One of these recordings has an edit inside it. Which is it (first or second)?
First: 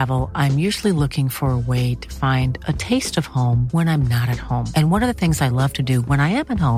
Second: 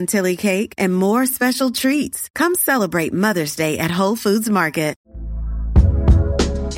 second